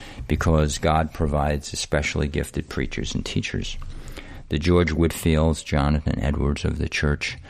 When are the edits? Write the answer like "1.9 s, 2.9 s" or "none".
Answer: none